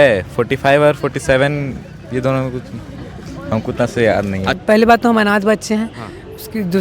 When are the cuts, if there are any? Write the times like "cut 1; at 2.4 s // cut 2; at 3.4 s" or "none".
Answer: cut 1; at 4.6 s